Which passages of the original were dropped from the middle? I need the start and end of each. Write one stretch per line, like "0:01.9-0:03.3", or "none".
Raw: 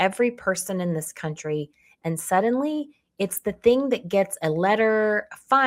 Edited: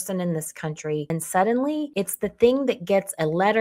0:01.7-0:02.0
0:02.8-0:03.1